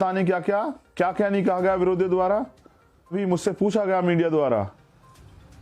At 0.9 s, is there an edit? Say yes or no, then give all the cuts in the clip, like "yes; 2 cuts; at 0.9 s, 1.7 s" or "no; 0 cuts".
no; 1 cut; at 3.1 s